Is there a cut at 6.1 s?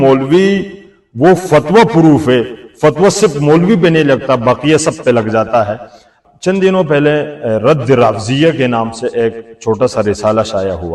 yes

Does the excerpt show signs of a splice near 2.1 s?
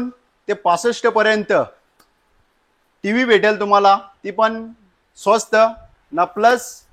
no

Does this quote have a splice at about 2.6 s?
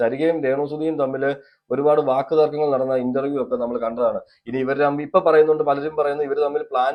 no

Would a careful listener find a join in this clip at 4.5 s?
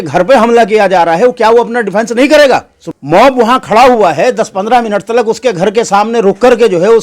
no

